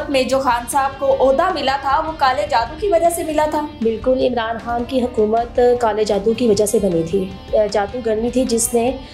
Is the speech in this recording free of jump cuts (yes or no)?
no